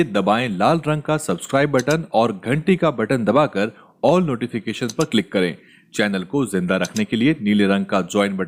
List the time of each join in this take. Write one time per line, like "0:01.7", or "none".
none